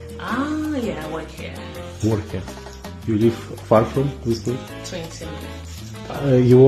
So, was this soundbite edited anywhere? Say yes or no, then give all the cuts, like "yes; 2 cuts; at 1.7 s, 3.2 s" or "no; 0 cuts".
no; 0 cuts